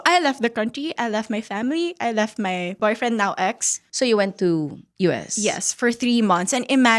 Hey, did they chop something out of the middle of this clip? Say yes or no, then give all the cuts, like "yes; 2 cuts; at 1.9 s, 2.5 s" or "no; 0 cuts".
yes; 2 cuts; at 2.8 s, 3.8 s